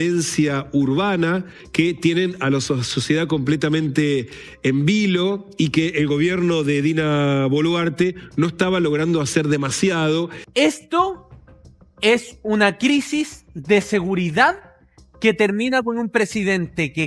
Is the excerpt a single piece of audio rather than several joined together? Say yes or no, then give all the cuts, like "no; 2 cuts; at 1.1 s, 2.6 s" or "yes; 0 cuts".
no; 2 cuts; at 1.6 s, 10.4 s